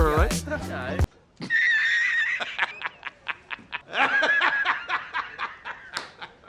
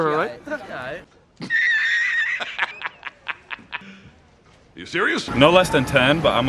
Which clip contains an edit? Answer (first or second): second